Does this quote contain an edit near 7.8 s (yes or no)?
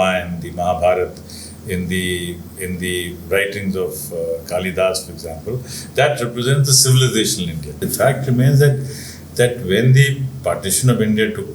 yes